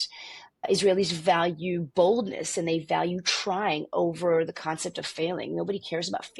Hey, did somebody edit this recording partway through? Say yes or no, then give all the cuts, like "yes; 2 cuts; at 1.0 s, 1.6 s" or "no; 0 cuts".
no; 0 cuts